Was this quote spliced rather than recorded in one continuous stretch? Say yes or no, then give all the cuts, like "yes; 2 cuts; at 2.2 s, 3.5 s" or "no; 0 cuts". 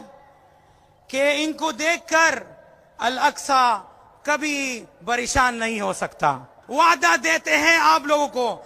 yes; 1 cut; at 6.5 s